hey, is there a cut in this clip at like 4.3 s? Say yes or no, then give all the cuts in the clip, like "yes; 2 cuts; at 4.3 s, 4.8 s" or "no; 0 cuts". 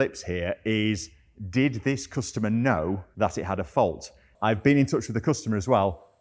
yes; 2 cuts; at 3.1 s, 4.3 s